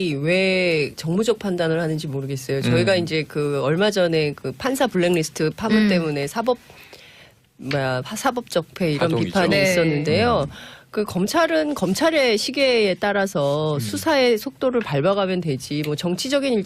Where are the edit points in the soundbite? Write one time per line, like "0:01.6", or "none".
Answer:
none